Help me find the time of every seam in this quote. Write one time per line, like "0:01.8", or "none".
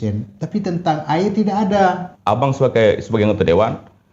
0:02.1

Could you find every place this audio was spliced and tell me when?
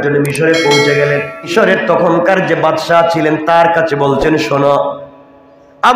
0:01.5

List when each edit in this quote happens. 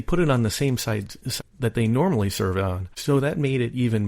0:01.3
0:02.9

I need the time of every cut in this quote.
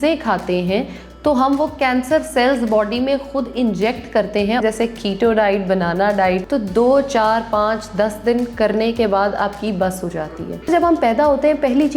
0:04.6
0:06.4
0:10.7

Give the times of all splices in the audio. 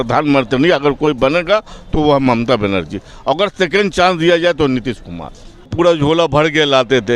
0:05.7

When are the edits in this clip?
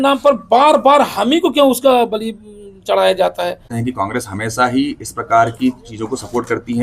0:03.7

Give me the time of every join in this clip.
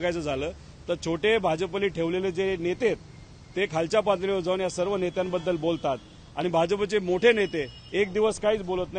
none

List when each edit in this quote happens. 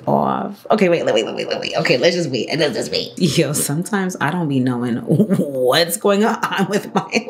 0:03.1

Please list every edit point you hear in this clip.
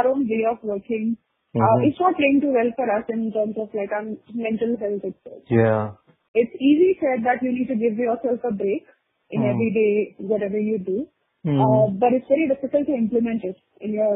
0:06.1

